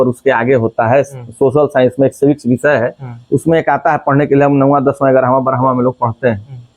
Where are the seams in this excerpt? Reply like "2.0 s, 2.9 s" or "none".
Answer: none